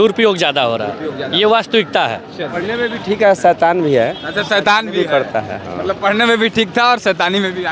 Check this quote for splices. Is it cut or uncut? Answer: cut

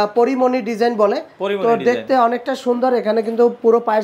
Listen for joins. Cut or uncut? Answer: uncut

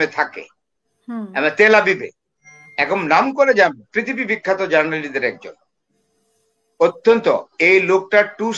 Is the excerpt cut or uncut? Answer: uncut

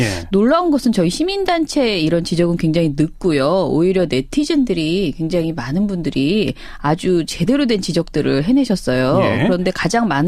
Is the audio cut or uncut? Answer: uncut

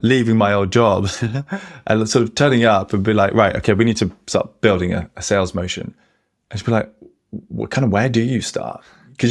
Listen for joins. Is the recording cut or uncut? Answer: uncut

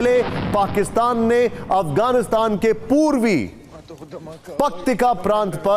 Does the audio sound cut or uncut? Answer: uncut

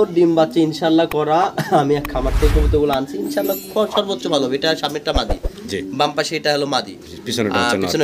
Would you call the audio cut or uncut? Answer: uncut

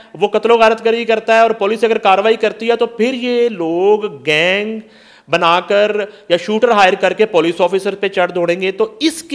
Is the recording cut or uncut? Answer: uncut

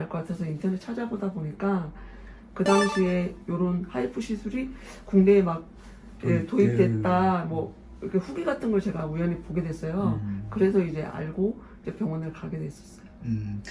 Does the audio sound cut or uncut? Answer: uncut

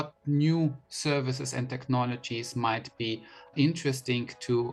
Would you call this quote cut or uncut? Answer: uncut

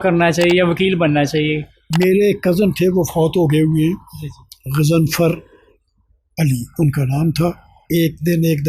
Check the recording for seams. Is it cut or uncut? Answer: cut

